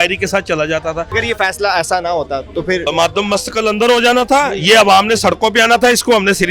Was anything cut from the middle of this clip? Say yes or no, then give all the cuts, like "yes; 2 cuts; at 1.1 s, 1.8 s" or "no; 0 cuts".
yes; 2 cuts; at 1.1 s, 2.8 s